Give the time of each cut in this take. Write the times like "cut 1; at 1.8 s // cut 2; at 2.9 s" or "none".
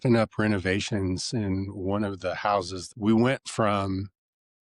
cut 1; at 2.8 s

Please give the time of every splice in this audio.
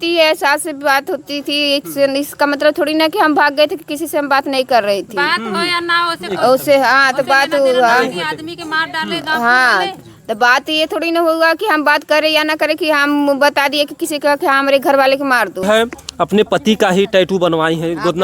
cut 1; at 15.6 s

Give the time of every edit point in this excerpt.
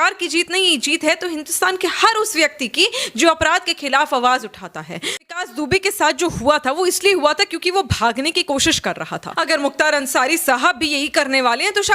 cut 1; at 5.2 s // cut 2; at 9.3 s

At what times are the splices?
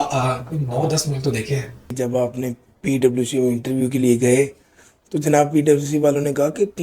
cut 1; at 1.9 s

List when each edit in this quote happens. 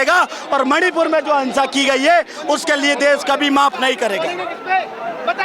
none

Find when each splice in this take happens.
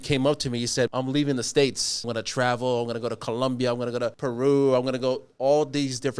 cut 1; at 0.9 s // cut 2; at 2.1 s // cut 3; at 4.2 s

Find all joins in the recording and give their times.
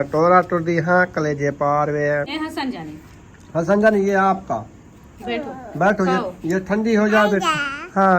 cut 1; at 2.4 s

